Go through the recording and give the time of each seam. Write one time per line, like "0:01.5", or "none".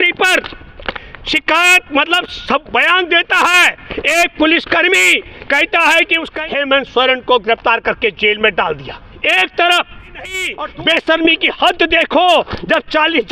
0:06.3
0:10.4